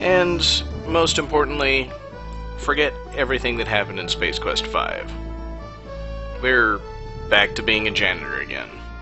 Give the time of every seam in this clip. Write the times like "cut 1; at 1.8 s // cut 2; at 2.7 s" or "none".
cut 1; at 6.3 s